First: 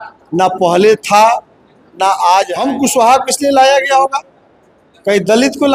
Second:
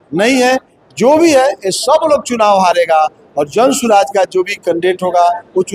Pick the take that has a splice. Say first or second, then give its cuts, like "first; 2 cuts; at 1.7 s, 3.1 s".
first; 1 cut; at 2.6 s